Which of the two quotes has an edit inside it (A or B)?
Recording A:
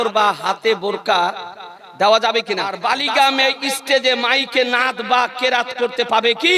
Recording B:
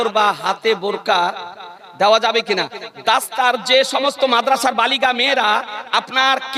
A